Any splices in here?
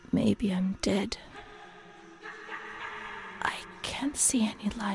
no; 0 cuts

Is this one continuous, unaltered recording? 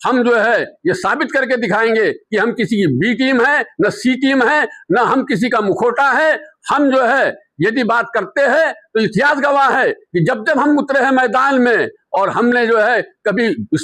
yes; 0 cuts

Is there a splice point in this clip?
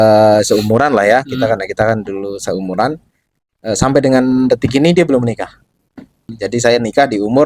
yes; 1 cut; at 6.3 s

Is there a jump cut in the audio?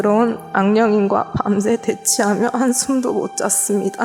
no; 0 cuts

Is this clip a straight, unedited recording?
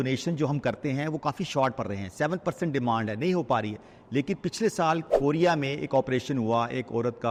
yes; 0 cuts

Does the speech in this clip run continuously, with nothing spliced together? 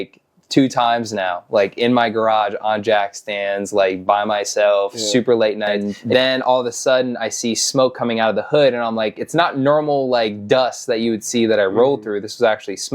no; 1 cut; at 5.9 s

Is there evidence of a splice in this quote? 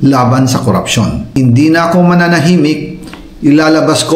yes; 1 cut; at 1.3 s

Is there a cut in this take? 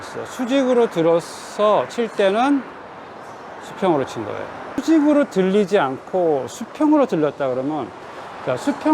yes; 1 cut; at 4.8 s

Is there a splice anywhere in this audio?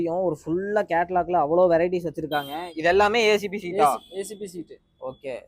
no; 0 cuts

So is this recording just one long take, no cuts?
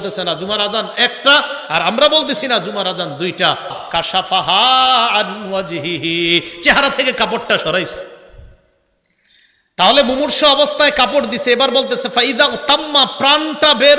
no; 1 cut; at 3.8 s

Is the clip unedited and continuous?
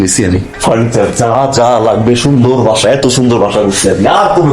yes; 0 cuts

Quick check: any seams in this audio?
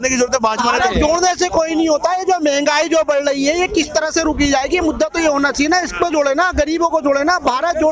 no; 0 cuts

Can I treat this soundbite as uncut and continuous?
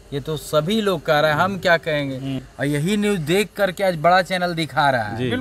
no; 1 cut; at 2.5 s

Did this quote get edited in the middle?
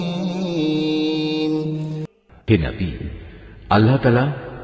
yes; 1 cut; at 2.0 s

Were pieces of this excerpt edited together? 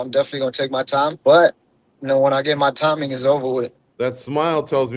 yes; 2 cuts; at 1.2 s, 3.8 s

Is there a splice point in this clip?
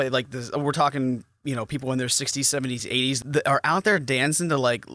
yes; 1 cut; at 3.2 s

